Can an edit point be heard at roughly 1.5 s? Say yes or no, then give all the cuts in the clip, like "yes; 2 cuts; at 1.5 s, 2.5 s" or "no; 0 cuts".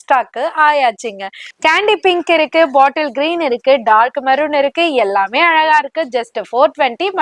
yes; 1 cut; at 1.5 s